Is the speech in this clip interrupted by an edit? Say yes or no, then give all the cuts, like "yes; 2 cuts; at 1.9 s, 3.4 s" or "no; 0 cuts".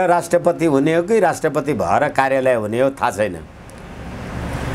no; 0 cuts